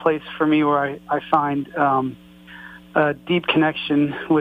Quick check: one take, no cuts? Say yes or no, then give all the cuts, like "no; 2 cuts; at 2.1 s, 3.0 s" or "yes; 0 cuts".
yes; 0 cuts